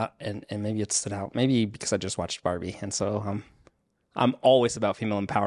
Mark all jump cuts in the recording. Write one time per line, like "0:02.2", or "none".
none